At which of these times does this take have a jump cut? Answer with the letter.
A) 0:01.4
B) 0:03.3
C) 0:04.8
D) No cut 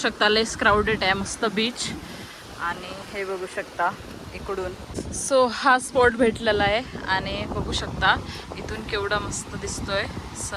C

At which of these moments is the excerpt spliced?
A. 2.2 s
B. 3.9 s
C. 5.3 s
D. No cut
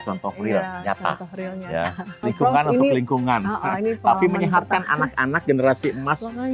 A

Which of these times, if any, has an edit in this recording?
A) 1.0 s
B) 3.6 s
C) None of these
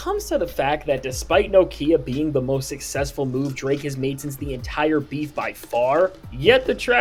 C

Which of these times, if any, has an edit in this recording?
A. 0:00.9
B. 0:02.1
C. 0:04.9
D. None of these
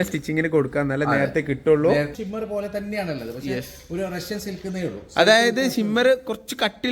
B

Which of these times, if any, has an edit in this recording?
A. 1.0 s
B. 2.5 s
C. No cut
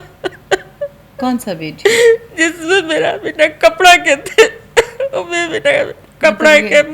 A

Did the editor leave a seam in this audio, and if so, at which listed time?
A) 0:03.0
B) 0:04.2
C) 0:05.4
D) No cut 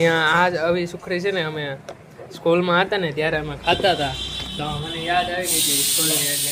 D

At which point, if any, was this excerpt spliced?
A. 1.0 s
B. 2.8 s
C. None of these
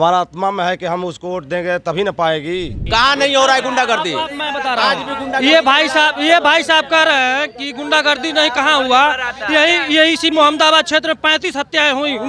B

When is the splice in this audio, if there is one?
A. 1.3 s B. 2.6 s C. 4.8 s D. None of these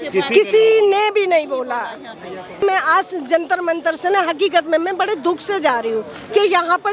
B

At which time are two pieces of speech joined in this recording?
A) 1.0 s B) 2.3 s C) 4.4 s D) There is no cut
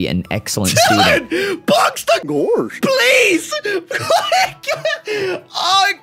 B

